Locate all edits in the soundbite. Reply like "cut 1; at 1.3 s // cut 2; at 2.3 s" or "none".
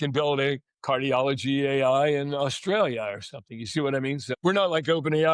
cut 1; at 4.3 s